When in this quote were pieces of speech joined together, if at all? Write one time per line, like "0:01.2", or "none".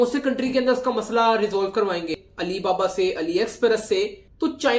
0:02.2